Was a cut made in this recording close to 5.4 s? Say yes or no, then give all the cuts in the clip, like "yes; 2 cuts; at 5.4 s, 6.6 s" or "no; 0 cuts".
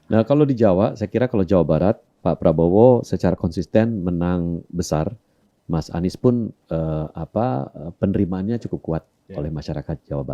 yes; 1 cut; at 5.4 s